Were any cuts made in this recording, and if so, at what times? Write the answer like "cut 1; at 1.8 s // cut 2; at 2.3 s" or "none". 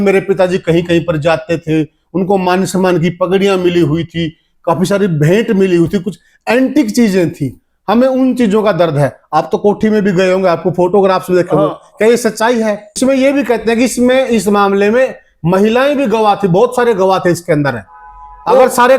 cut 1; at 12.6 s